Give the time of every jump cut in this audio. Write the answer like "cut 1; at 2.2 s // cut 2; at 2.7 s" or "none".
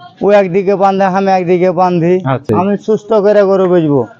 cut 1; at 2.5 s

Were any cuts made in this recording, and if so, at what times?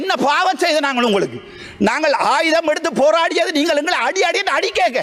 none

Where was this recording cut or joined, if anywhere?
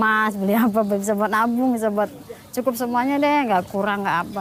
none

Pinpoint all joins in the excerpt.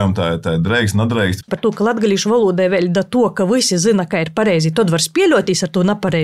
cut 1; at 1.5 s

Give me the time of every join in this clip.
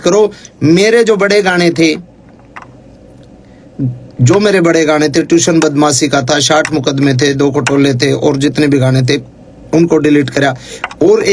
none

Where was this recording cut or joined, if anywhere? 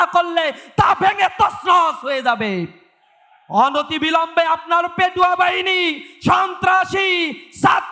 none

